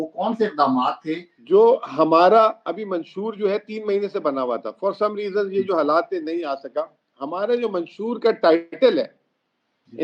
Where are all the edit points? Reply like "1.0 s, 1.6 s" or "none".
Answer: 1.3 s